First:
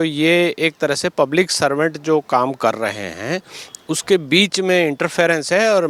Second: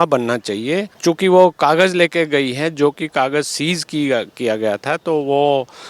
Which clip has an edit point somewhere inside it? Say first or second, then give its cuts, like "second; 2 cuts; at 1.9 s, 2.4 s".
second; 1 cut; at 0.9 s